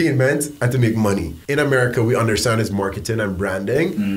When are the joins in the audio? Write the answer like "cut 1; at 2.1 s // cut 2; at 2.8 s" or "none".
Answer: cut 1; at 1.3 s